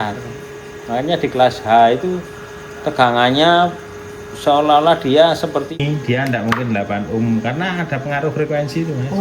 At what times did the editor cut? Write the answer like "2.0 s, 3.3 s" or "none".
5.8 s